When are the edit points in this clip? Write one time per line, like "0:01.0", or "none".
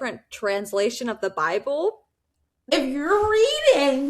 0:02.7